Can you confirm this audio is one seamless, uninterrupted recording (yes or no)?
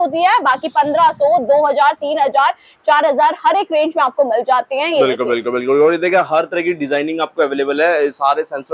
yes